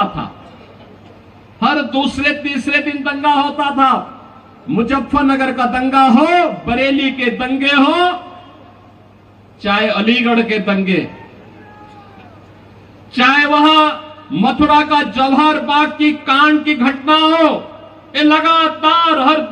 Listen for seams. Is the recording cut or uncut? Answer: uncut